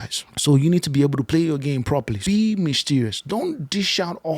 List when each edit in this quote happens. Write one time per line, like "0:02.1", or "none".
0:02.2